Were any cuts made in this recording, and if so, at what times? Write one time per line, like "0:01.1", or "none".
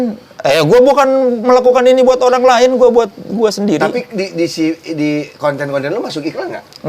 none